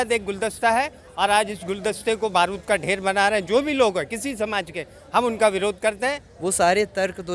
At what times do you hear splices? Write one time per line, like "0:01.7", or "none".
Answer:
0:06.3